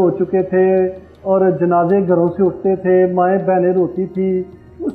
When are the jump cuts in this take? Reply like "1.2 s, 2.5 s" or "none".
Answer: none